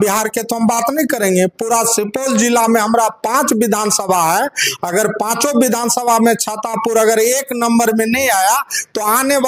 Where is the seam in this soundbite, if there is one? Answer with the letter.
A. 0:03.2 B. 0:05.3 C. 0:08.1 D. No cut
D